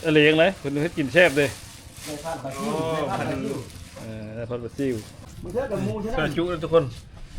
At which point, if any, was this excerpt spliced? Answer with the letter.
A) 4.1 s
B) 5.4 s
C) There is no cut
B